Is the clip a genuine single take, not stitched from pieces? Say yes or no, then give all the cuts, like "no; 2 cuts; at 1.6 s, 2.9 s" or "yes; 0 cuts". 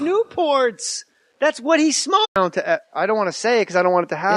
yes; 0 cuts